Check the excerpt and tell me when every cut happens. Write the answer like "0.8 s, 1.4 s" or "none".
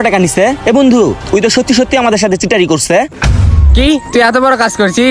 3.1 s